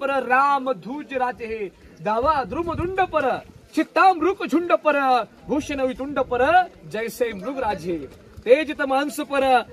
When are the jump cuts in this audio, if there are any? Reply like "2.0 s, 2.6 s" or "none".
none